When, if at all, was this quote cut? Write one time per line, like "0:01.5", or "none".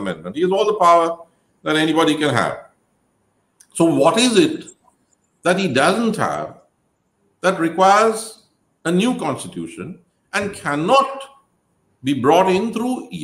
none